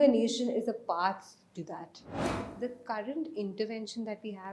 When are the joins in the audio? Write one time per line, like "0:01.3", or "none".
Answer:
0:02.4